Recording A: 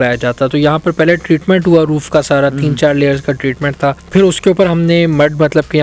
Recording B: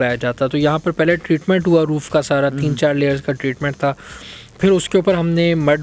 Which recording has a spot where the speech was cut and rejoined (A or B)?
A